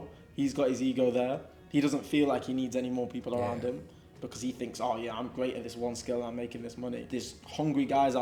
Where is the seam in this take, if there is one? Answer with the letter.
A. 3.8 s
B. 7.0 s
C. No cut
B